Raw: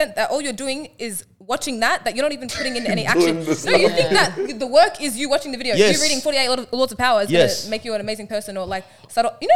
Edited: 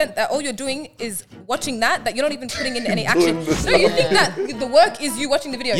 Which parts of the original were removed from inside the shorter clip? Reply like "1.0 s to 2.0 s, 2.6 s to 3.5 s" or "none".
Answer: none